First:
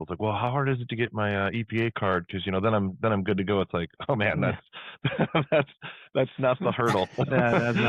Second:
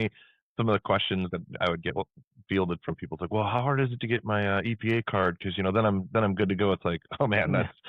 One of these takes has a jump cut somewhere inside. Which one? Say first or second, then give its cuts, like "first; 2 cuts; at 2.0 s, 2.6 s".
second; 1 cut; at 1.3 s